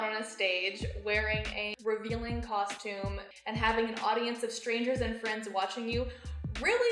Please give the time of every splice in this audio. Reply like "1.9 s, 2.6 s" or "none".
1.7 s, 3.3 s